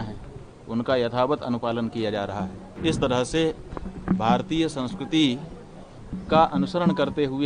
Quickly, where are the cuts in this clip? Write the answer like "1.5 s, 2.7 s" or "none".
2.6 s